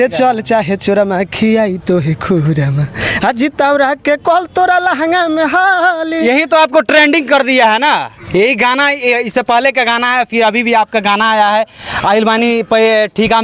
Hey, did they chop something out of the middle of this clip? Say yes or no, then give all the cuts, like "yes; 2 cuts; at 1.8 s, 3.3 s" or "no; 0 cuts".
no; 0 cuts